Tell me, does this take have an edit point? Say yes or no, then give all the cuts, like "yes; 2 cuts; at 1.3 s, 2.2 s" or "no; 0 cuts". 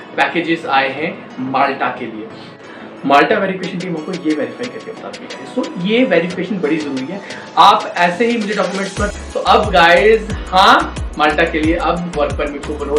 yes; 2 cuts; at 2.4 s, 9.2 s